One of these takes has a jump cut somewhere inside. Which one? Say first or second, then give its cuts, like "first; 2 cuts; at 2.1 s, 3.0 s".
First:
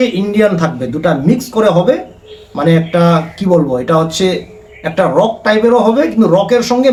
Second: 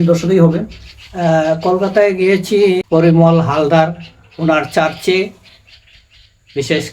second; 1 cut; at 2.8 s